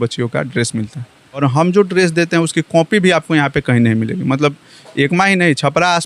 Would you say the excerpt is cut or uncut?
cut